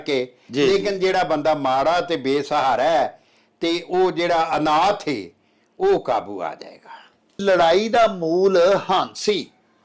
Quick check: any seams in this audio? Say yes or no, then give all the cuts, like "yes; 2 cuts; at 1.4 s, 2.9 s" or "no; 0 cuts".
yes; 1 cut; at 7.4 s